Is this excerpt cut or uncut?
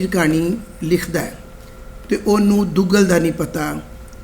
uncut